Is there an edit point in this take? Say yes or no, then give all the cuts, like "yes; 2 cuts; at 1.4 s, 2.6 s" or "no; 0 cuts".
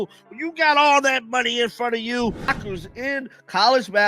yes; 1 cut; at 2.4 s